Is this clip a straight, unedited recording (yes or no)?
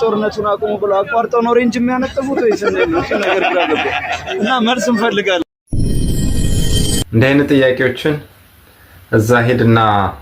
no